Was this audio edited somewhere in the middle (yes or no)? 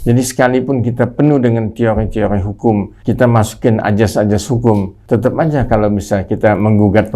yes